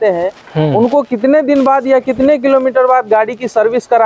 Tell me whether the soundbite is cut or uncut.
uncut